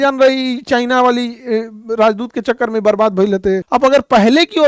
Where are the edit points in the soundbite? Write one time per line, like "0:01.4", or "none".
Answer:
0:03.6

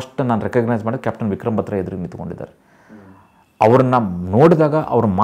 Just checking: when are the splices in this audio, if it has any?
none

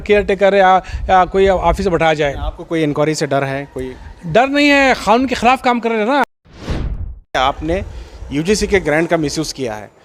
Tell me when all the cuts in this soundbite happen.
0:06.8

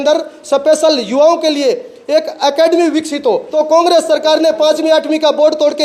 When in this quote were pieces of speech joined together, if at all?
0:03.5

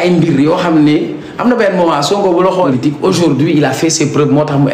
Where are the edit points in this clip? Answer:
0:02.7

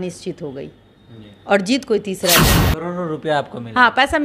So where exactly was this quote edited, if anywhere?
0:02.7

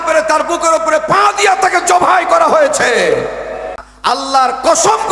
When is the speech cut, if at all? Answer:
0:03.9

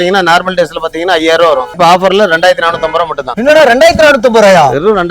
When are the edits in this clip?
none

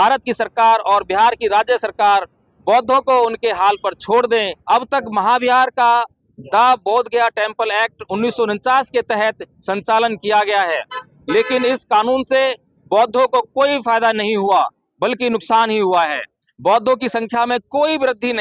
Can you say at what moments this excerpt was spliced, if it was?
0:04.5

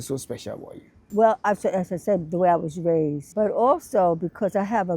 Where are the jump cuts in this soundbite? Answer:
0:01.1
0:03.2

